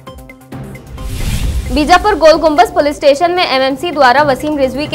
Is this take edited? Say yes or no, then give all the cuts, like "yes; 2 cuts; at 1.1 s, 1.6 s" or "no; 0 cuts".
no; 0 cuts